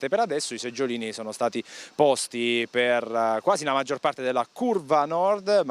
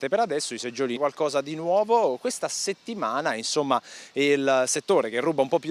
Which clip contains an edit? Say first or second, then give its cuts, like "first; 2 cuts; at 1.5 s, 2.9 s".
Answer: first; 1 cut; at 1.0 s